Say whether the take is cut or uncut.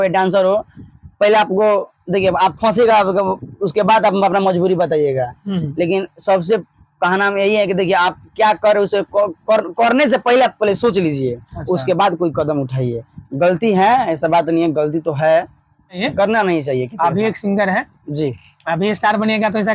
cut